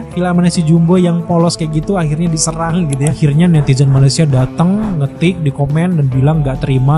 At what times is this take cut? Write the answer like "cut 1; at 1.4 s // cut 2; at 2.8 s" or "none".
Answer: cut 1; at 3.2 s